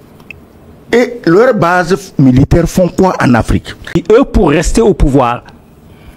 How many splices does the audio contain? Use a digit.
1